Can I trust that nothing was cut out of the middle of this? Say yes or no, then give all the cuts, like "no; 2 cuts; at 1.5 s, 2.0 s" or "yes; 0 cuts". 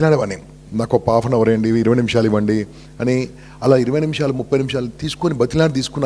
yes; 0 cuts